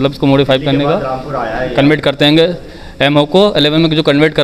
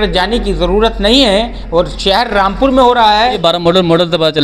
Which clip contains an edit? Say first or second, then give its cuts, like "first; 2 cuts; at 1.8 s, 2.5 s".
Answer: second; 1 cut; at 3.4 s